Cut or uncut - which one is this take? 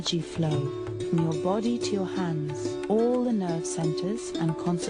cut